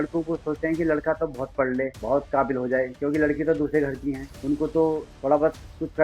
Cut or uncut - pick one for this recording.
cut